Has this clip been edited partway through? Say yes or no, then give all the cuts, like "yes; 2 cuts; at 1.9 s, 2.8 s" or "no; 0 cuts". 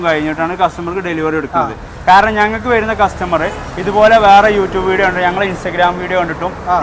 no; 0 cuts